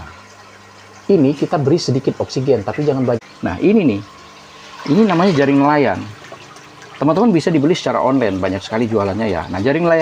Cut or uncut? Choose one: cut